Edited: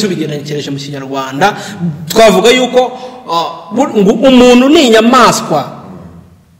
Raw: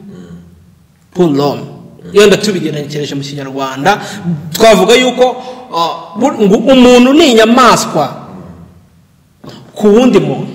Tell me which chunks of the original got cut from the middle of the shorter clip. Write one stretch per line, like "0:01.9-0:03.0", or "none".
none